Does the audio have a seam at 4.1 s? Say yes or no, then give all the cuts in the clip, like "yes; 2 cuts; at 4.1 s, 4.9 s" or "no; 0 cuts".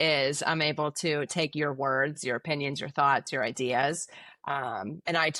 no; 0 cuts